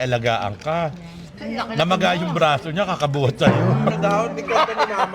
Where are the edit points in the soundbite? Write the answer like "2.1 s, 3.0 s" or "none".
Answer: 3.9 s